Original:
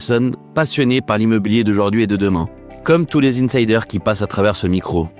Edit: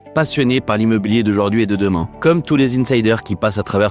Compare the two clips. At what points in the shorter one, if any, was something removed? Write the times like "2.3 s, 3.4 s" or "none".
2.1 s